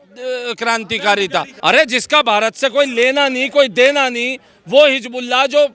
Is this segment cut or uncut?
cut